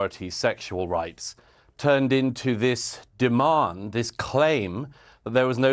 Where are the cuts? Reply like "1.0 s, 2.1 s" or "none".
none